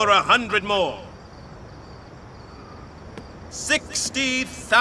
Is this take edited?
yes; 1 cut; at 3.0 s

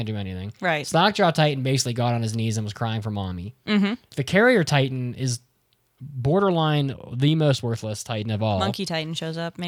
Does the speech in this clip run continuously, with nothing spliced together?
no; 2 cuts; at 4.1 s, 8.7 s

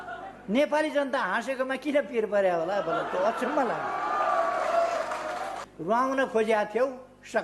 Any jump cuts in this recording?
yes; 1 cut; at 5.6 s

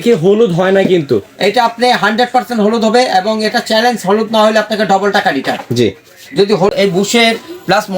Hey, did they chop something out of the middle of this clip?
yes; 1 cut; at 6.7 s

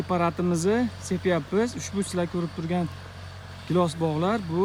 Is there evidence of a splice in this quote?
no; 0 cuts

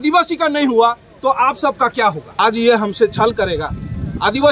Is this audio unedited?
no; 1 cut; at 2.2 s

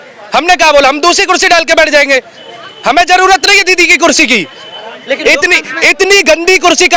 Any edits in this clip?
no; 0 cuts

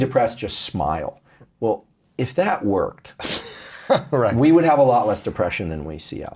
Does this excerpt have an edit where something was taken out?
no; 0 cuts

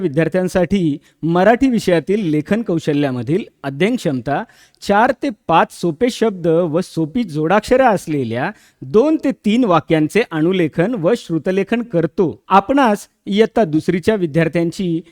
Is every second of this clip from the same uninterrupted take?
no; 1 cut; at 12.4 s

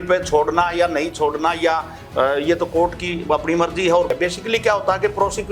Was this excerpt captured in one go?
no; 1 cut; at 4.1 s

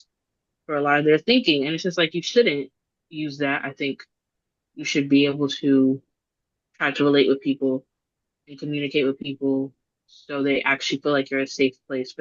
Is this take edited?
no; 0 cuts

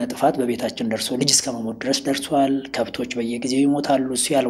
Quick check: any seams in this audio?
no; 0 cuts

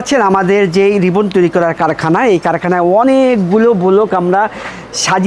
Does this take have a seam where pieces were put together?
no; 0 cuts

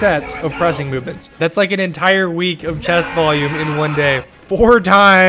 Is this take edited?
yes; 2 cuts; at 1.4 s, 4.3 s

